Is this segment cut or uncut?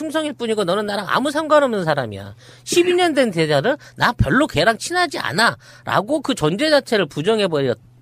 cut